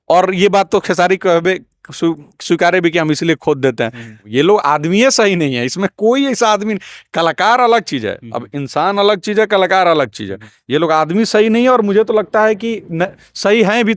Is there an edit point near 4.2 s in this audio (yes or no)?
yes